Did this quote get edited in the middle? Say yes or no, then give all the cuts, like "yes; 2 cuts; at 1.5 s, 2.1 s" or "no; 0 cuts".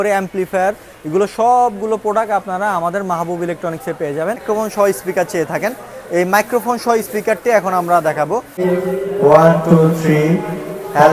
yes; 2 cuts; at 4.4 s, 8.6 s